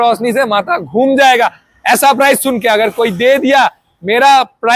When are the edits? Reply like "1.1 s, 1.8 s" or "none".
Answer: none